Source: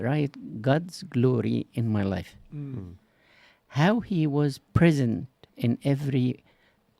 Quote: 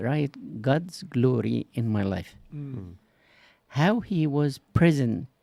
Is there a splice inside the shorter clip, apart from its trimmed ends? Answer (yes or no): no